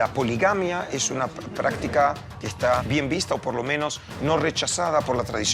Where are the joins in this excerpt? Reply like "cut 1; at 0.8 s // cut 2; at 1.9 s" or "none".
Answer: cut 1; at 2.8 s